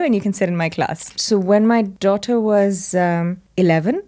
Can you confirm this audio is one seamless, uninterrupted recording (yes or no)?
no